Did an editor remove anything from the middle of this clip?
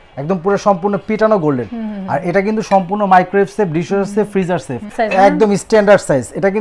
yes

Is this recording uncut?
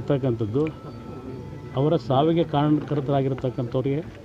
yes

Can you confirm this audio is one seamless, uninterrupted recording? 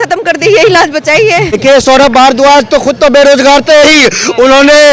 no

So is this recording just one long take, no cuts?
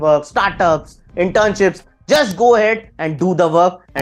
yes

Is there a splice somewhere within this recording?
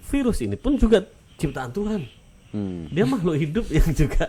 no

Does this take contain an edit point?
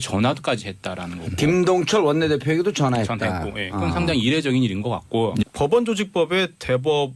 no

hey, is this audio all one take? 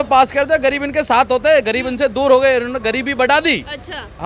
yes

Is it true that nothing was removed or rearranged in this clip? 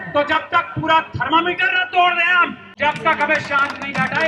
no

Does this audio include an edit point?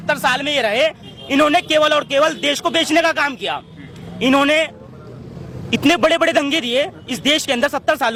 no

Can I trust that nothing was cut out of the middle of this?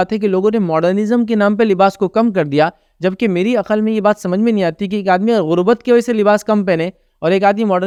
yes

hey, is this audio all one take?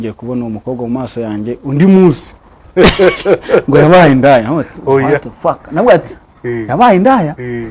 no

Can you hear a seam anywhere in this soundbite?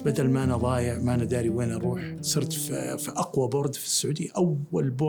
no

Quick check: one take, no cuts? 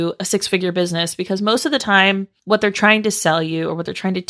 no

